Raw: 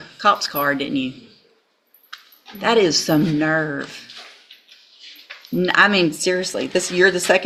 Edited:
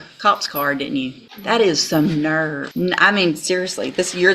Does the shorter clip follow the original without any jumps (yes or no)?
no